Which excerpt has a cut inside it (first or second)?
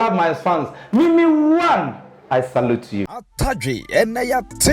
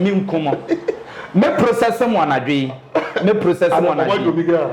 first